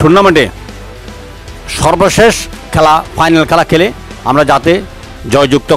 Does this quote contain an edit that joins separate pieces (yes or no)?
no